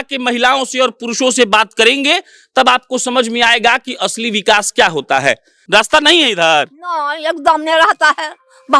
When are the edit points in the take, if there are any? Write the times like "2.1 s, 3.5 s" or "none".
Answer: 5.5 s

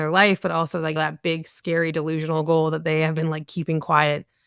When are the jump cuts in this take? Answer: 1.0 s

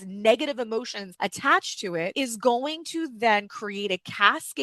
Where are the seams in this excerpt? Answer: 1.0 s, 2.1 s

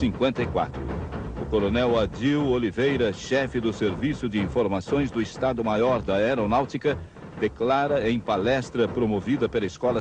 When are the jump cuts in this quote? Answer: 2.3 s

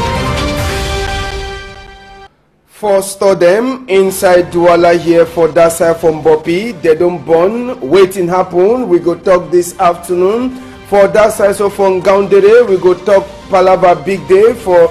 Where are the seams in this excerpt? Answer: 1.5 s

